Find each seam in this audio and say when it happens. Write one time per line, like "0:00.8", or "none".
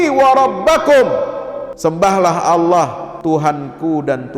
0:01.6
0:03.1